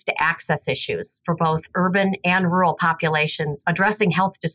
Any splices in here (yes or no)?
yes